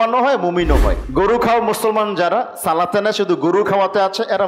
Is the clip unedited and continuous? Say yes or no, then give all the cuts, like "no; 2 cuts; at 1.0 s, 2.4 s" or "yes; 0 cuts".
no; 1 cut; at 1.0 s